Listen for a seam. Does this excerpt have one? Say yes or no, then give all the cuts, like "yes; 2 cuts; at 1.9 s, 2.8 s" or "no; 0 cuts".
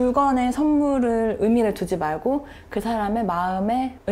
no; 0 cuts